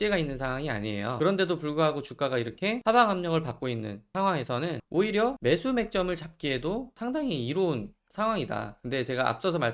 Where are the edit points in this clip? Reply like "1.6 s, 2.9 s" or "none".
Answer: 1.1 s, 2.8 s, 4.0 s, 4.8 s, 5.4 s, 6.9 s